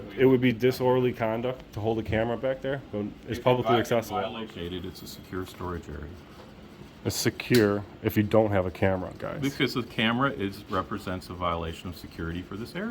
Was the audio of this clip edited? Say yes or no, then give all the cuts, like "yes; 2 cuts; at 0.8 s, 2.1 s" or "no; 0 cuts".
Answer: yes; 1 cut; at 4.4 s